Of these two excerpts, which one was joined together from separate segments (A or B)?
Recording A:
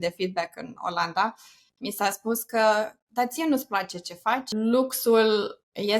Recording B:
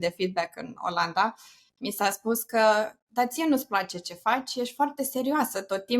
A